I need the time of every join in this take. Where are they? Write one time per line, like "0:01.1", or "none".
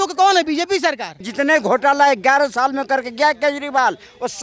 0:01.3